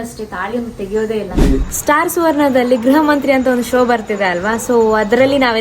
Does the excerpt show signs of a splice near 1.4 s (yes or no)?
yes